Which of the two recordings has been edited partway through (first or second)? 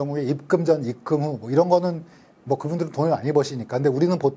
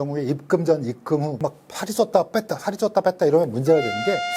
second